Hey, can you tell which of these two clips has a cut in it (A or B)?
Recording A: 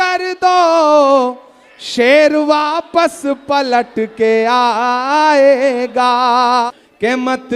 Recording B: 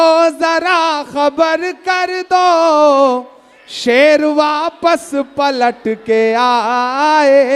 A